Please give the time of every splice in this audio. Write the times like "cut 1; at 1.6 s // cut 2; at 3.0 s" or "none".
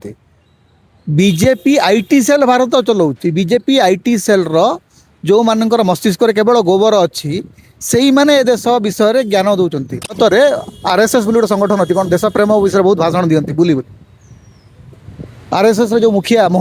cut 1; at 10.2 s